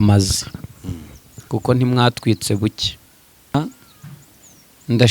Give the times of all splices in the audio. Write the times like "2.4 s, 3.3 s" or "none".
3.5 s